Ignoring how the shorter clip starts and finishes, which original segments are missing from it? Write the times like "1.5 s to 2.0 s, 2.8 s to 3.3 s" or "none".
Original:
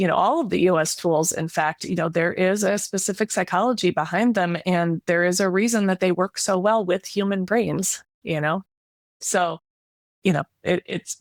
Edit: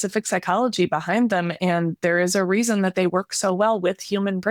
none